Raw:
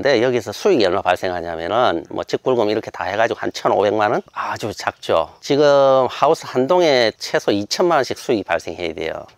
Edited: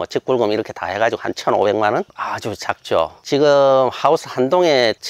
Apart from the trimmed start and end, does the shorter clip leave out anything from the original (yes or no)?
no